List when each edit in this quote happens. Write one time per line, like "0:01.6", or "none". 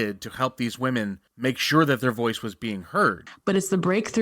0:01.2
0:03.3